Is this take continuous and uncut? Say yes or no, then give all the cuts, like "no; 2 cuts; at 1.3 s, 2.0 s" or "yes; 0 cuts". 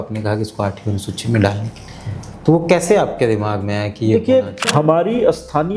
no; 1 cut; at 4.7 s